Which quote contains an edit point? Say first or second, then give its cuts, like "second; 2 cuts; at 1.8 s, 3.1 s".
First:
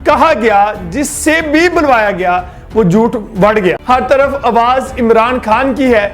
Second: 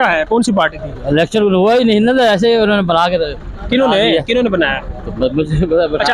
first; 1 cut; at 3.8 s